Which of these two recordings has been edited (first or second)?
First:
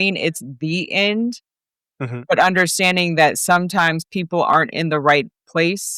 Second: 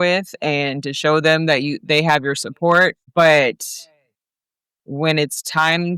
second